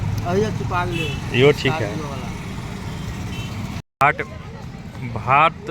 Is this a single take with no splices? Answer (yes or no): no